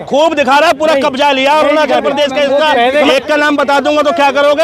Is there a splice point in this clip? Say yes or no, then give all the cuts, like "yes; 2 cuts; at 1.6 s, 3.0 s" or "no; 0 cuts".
yes; 1 cut; at 3.1 s